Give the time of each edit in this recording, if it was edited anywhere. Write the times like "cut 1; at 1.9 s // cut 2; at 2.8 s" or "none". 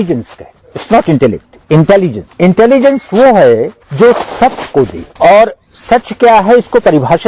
cut 1; at 2.2 s // cut 2; at 3.8 s // cut 3; at 5.0 s

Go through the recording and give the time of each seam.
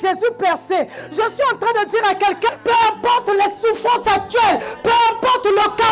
cut 1; at 1.0 s // cut 2; at 2.5 s // cut 3; at 4.7 s

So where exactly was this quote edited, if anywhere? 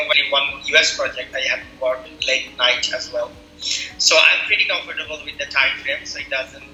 none

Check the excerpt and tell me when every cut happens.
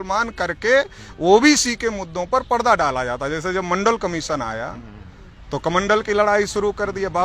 none

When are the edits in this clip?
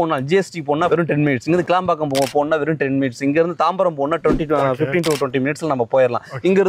none

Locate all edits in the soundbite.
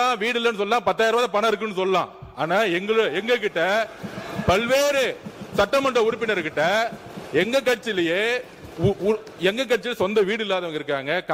none

